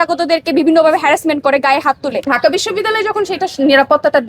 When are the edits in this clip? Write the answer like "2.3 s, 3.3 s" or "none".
2.2 s